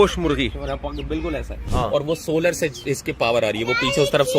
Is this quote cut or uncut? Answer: cut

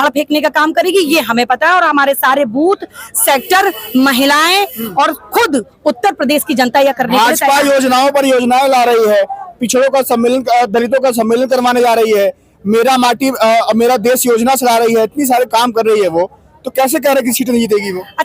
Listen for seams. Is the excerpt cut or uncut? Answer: uncut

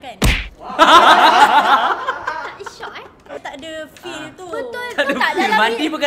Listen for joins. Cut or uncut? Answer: cut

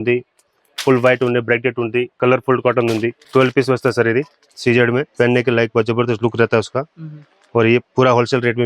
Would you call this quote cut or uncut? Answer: cut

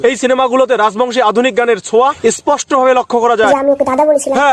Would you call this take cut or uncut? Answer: cut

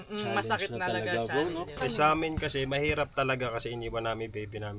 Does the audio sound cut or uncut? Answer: cut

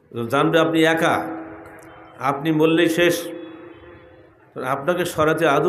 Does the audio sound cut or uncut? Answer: uncut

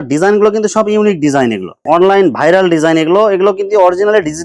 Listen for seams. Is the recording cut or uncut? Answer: cut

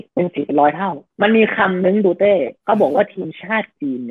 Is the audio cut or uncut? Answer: cut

